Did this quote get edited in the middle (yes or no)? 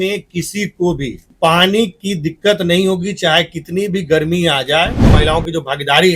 yes